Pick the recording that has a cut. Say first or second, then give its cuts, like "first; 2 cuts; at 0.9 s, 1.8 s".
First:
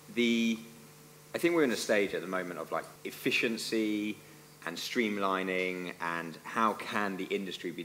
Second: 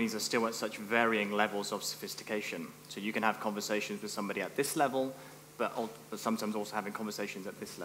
first; 1 cut; at 3.0 s